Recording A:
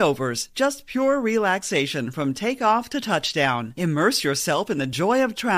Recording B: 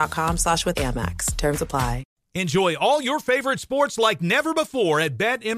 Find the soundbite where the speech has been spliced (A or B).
B